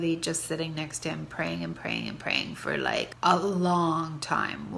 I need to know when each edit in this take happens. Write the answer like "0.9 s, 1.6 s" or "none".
3.1 s